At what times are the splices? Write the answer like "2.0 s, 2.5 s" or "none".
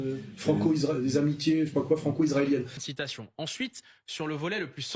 2.8 s